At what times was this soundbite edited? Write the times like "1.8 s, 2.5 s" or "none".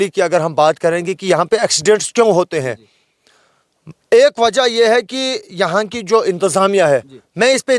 none